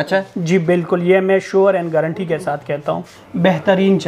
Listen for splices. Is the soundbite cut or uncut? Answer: cut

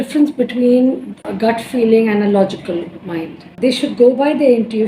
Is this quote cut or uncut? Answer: cut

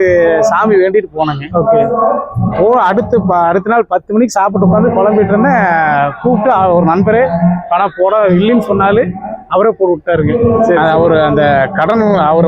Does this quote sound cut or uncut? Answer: uncut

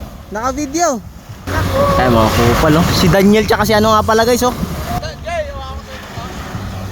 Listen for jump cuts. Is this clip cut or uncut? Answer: cut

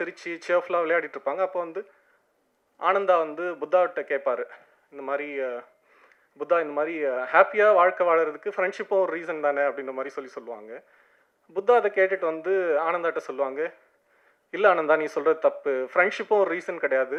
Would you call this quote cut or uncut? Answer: uncut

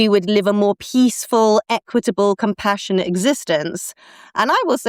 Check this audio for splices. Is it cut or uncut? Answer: uncut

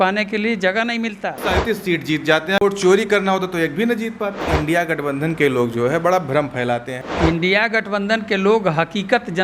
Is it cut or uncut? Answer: cut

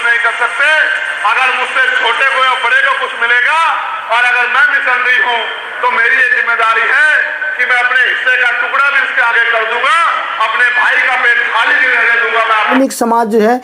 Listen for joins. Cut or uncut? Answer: cut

